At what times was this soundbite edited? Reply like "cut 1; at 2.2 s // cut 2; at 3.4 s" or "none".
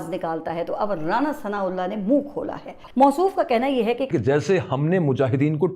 cut 1; at 2.7 s // cut 2; at 4.1 s